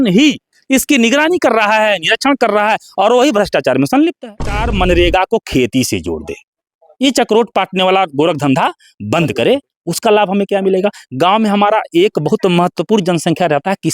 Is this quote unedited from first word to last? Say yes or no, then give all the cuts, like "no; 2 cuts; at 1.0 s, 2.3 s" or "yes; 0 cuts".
no; 1 cut; at 4.6 s